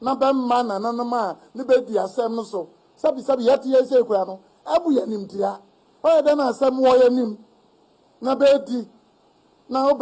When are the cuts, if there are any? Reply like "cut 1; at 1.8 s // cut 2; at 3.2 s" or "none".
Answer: none